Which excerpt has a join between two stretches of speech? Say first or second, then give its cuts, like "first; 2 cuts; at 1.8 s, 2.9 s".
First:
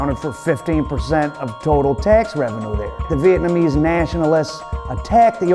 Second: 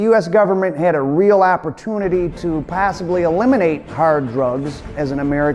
first; 1 cut; at 2.2 s